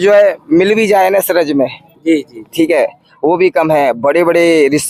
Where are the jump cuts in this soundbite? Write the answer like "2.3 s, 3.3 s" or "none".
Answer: none

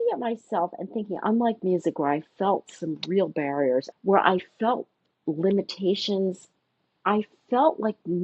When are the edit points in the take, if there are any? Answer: 3.9 s

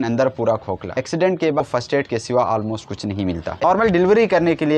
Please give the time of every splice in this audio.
1.6 s, 3.6 s

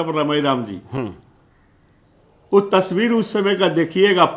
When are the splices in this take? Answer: none

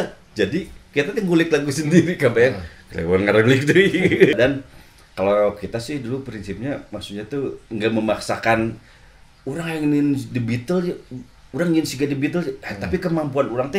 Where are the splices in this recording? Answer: 4.3 s

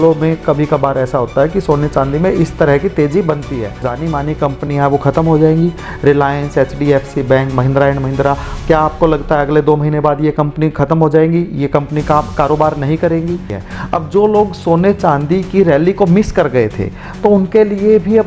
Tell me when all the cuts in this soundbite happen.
3.9 s, 13.6 s

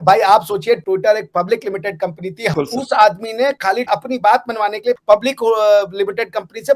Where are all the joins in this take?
2.5 s, 5.0 s

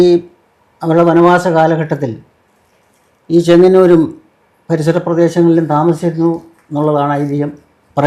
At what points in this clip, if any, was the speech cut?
none

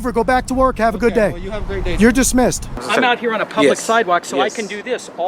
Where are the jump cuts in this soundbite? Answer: 2.8 s

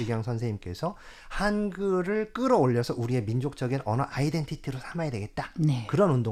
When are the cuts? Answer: none

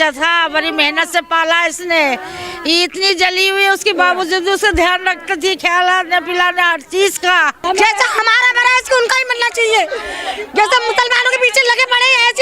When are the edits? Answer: 7.6 s

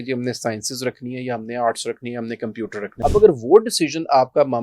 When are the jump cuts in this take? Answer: 2.9 s

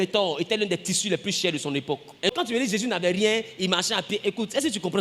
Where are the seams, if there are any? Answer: 2.3 s

